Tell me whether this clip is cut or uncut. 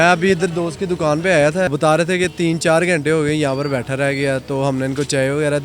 cut